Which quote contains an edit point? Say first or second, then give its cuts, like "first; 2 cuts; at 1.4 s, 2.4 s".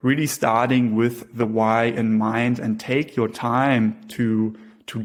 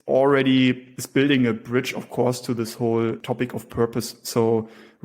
second; 2 cuts; at 0.9 s, 3.2 s